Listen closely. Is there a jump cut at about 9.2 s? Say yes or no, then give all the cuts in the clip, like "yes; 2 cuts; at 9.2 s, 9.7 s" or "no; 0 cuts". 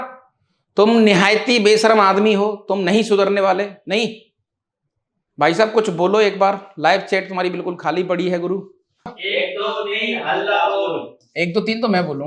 yes; 1 cut; at 9.2 s